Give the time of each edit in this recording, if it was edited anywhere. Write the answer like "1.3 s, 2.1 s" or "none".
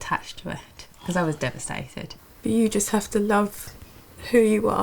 2.1 s